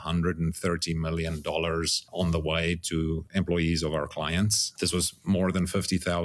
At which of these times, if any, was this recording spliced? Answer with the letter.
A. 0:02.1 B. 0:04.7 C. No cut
B